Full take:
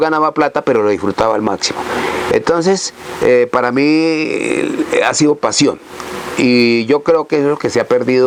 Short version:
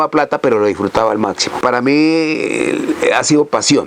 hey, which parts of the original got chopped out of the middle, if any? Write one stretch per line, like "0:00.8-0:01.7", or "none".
0:01.8-0:03.5